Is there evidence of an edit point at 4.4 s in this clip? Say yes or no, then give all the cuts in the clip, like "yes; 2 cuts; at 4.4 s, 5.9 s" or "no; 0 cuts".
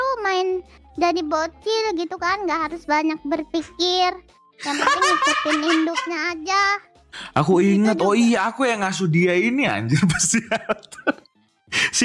no; 1 cut; at 7.0 s